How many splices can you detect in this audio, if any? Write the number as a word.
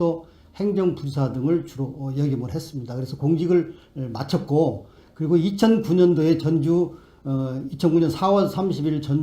one